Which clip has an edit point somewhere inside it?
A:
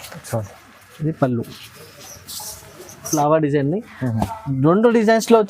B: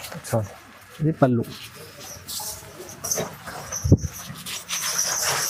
A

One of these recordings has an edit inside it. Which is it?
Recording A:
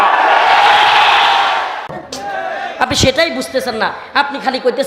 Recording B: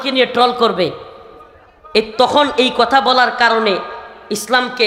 A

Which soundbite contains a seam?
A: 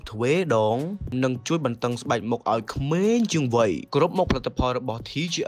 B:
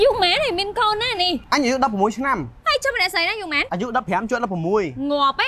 B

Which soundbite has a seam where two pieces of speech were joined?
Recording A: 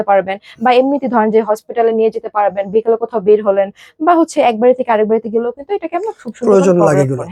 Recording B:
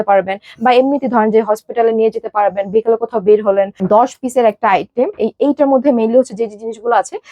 B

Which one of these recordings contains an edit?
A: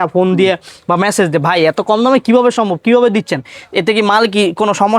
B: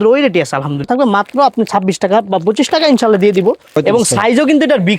B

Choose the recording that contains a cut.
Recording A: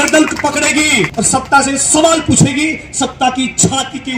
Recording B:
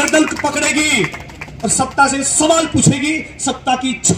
A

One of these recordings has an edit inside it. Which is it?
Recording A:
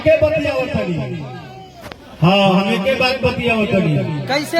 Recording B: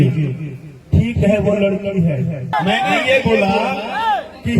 B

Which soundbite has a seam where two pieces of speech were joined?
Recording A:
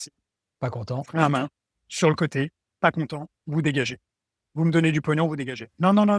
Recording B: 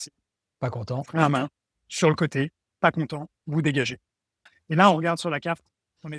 B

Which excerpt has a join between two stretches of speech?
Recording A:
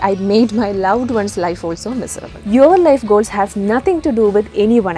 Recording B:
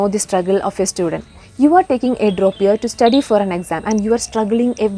A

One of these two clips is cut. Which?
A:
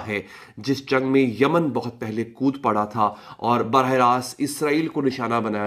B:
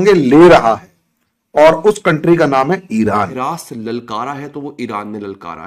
B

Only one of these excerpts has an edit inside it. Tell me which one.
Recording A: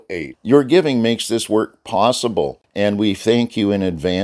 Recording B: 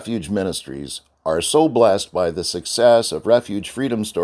A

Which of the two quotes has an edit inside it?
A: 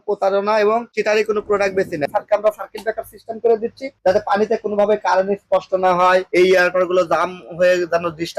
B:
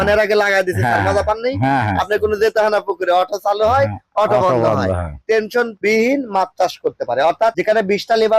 A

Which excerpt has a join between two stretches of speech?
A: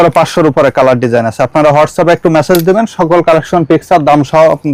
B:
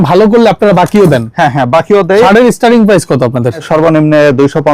B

